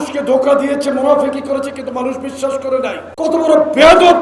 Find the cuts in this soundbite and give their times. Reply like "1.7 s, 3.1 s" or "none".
3.0 s